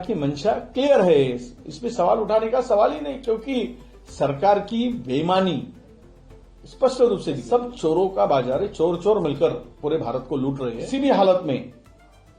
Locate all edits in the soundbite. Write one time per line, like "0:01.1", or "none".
0:07.4
0:10.8